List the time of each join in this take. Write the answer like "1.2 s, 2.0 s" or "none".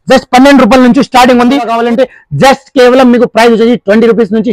1.7 s